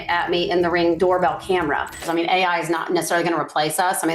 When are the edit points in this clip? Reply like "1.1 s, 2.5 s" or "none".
1.0 s, 2.0 s